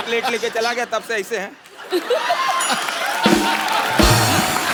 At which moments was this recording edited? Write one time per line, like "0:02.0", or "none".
none